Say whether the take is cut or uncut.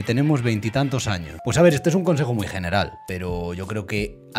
cut